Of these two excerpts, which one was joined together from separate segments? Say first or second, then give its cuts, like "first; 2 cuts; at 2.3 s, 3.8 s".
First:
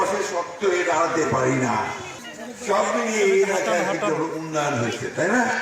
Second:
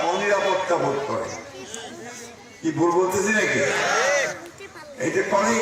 first; 1 cut; at 2.0 s